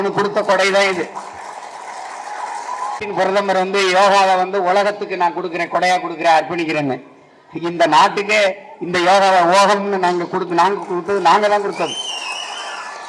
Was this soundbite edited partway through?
yes; 1 cut; at 3.0 s

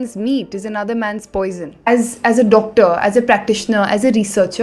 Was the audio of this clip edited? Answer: yes; 1 cut; at 1.9 s

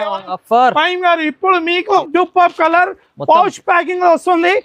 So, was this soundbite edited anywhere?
yes; 1 cut; at 2.0 s

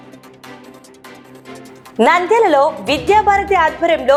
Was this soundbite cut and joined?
no; 0 cuts

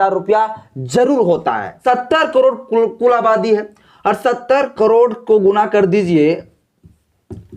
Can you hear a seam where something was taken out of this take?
yes; 1 cut; at 1.7 s

